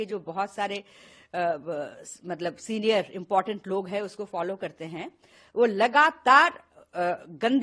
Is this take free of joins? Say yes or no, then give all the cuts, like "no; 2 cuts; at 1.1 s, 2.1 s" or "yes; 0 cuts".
yes; 0 cuts